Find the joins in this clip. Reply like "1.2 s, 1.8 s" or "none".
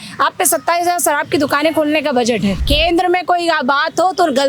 2.6 s